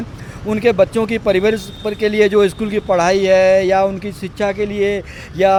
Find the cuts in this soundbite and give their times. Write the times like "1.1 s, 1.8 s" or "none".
none

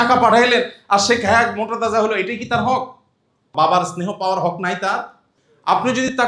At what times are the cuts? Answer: none

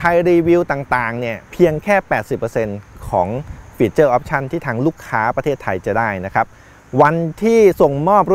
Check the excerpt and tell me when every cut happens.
none

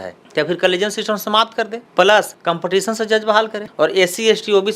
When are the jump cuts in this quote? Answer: 2.3 s, 3.6 s

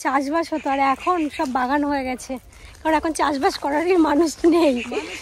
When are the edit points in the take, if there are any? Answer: none

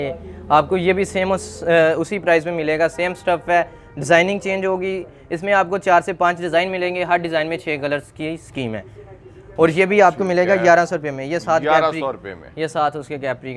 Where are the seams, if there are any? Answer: none

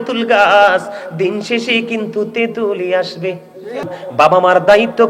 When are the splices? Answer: 3.8 s

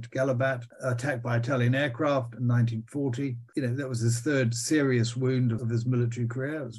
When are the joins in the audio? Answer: 5.6 s

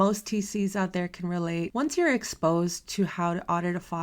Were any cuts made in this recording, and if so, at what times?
1.7 s

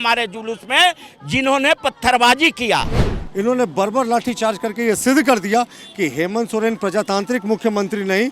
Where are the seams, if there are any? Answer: 3.1 s

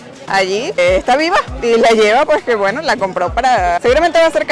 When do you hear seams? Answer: none

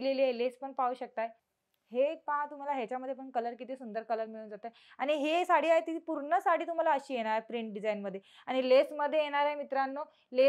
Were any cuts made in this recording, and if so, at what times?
1.5 s

